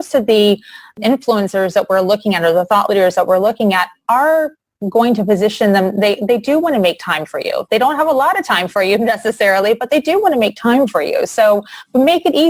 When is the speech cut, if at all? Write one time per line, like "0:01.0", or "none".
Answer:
0:00.9